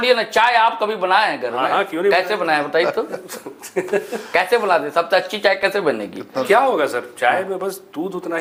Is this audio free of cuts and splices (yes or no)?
yes